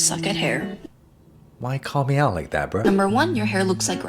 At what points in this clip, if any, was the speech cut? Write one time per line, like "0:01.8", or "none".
none